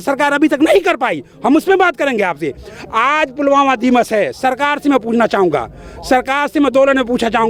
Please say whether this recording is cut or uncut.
uncut